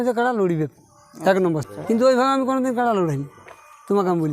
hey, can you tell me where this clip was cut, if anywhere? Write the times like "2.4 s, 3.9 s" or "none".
1.6 s